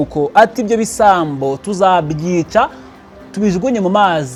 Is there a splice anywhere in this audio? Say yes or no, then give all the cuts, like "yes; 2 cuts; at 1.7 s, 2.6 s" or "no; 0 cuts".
no; 0 cuts